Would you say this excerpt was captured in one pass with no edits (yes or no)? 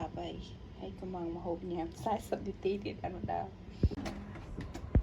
no